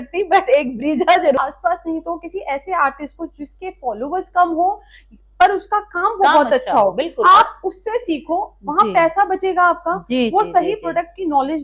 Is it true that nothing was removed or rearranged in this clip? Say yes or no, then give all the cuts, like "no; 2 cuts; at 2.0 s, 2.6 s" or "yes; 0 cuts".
no; 1 cut; at 1.4 s